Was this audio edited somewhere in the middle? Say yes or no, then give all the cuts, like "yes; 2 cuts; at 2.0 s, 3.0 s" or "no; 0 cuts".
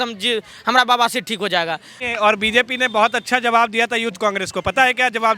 yes; 1 cut; at 1.9 s